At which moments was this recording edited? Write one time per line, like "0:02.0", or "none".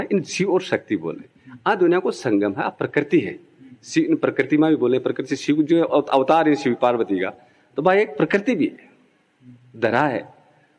none